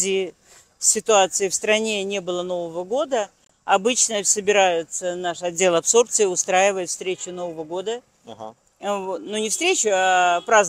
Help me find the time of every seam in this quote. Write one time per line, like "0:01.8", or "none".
none